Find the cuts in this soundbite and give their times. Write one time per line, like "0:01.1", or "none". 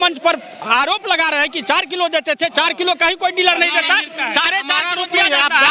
none